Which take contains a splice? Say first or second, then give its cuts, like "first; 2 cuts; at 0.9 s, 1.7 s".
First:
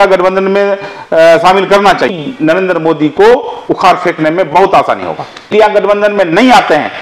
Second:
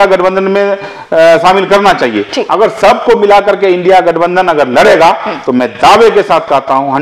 first; 2 cuts; at 2.2 s, 5.5 s